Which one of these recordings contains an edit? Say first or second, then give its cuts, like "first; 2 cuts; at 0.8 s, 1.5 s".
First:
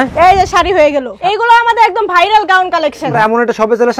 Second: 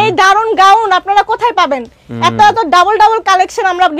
first; 2 cuts; at 1.1 s, 3.1 s